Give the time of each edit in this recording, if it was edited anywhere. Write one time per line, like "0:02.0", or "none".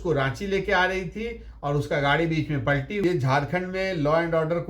0:03.0